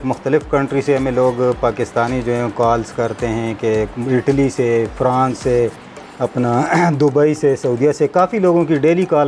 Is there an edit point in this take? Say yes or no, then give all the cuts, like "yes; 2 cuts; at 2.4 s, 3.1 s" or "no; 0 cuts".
no; 0 cuts